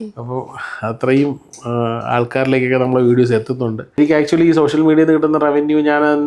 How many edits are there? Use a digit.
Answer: 1